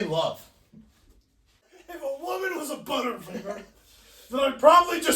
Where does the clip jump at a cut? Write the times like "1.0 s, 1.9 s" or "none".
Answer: 1.7 s